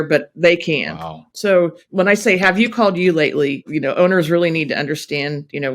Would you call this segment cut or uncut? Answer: cut